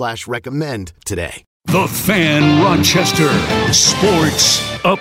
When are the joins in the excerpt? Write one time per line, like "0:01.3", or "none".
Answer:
0:01.5